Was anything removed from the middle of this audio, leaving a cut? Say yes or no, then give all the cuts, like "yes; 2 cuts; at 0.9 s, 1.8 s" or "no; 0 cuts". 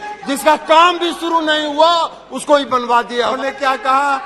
yes; 1 cut; at 3.4 s